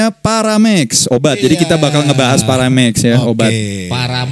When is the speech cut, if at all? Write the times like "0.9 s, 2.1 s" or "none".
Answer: 1.0 s